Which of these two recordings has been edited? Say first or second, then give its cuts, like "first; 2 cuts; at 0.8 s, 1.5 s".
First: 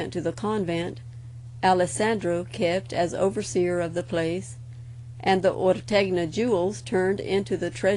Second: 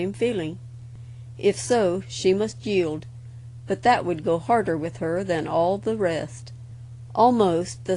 first; 1 cut; at 6.7 s